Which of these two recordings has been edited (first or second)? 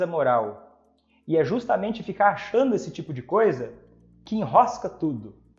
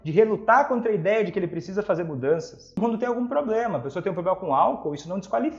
second